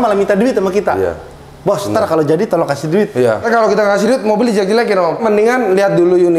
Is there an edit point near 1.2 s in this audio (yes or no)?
no